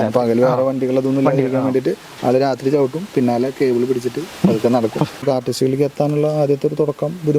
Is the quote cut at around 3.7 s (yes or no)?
no